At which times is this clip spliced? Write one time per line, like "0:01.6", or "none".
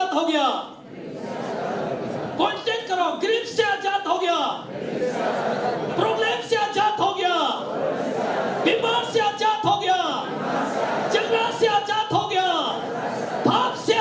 none